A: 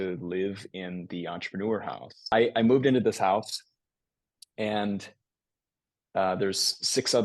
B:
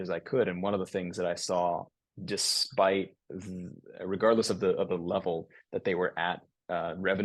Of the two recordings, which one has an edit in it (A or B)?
A